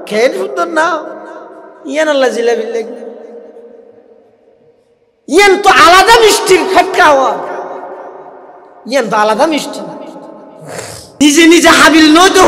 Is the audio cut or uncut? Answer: cut